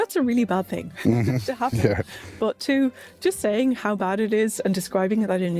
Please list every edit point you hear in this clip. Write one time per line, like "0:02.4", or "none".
none